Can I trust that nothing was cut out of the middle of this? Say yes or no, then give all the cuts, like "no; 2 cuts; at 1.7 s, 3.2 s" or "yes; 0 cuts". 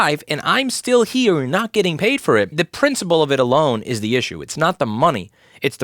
no; 1 cut; at 2.5 s